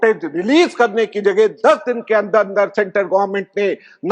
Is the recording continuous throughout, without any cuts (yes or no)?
yes